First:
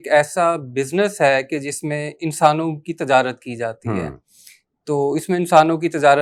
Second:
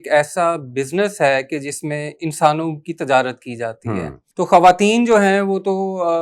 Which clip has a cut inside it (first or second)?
second